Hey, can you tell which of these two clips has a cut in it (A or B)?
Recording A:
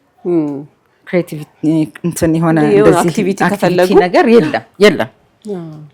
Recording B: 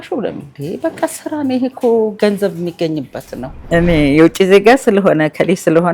B